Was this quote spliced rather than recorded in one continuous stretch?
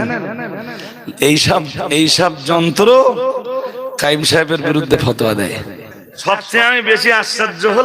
yes; 1 cut; at 6.2 s

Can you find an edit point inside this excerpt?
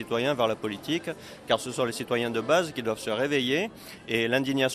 no; 0 cuts

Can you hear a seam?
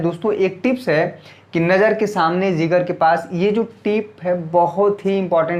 no; 0 cuts

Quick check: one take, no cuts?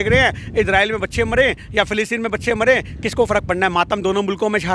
yes; 0 cuts

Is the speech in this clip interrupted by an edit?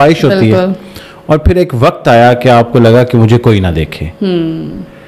no; 0 cuts

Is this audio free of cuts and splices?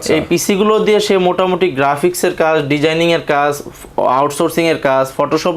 yes; 0 cuts

